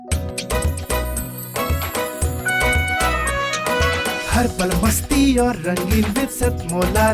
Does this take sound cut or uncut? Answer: uncut